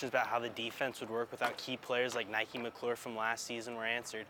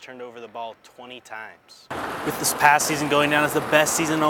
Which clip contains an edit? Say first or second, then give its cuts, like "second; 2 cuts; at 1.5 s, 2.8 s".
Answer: second; 1 cut; at 1.8 s